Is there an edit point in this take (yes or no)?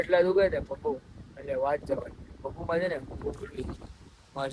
no